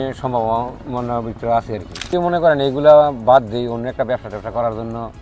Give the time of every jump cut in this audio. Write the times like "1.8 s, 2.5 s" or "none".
2.1 s